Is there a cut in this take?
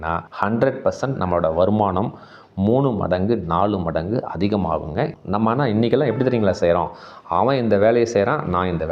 yes; 1 cut; at 5.2 s

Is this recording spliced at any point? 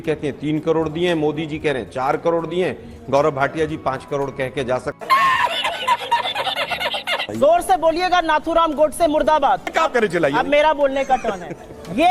yes; 3 cuts; at 5.0 s, 7.0 s, 9.7 s

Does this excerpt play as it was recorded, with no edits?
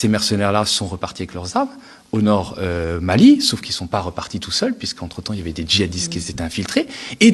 yes; 0 cuts

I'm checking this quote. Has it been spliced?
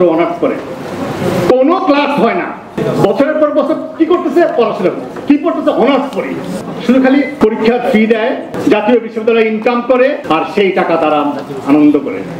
yes; 5 cuts; at 2.8 s, 6.6 s, 7.3 s, 8.5 s, 10.2 s

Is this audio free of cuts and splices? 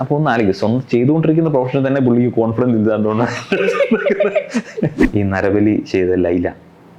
no; 1 cut; at 5.1 s

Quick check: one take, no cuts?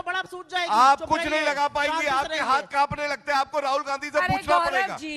yes; 0 cuts

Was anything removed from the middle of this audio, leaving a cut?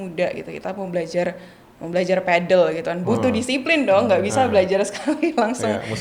no; 0 cuts

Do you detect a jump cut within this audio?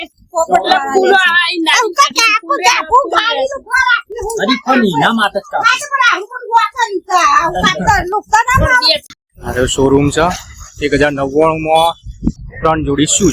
yes; 1 cut; at 9.1 s

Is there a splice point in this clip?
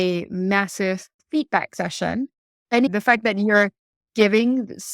yes; 2 cuts; at 1.2 s, 2.9 s

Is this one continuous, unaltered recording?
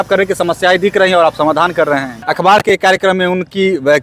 no; 1 cut; at 2.2 s

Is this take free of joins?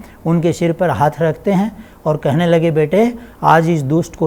yes; 0 cuts

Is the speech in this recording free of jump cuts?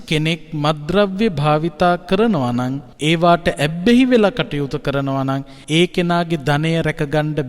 no; 2 cuts; at 2.9 s, 5.5 s

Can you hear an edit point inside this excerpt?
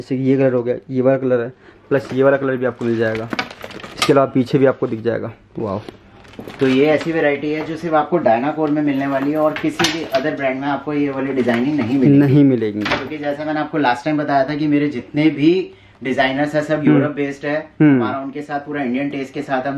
no; 0 cuts

